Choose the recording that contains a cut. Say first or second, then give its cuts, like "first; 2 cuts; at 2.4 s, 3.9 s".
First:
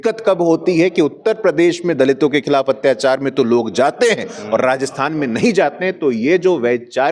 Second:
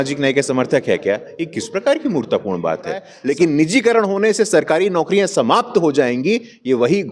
second; 1 cut; at 3.1 s